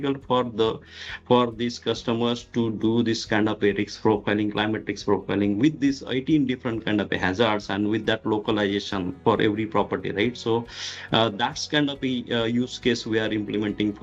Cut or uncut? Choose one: uncut